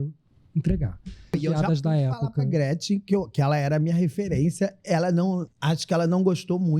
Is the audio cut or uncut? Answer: cut